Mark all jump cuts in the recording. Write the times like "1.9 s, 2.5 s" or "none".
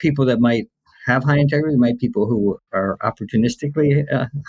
2.6 s